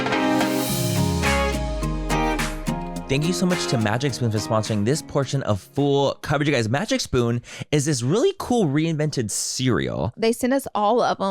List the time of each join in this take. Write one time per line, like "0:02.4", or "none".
0:03.0
0:10.1